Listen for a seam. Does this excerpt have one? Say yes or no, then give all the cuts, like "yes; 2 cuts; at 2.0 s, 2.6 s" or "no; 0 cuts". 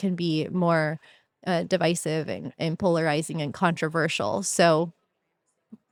no; 0 cuts